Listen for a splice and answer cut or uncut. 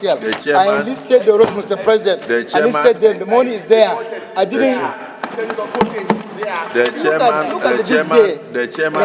uncut